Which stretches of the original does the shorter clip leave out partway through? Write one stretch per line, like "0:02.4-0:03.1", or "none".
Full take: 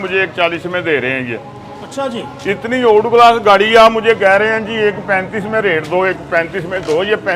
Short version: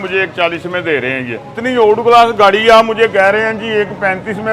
0:01.6-0:02.6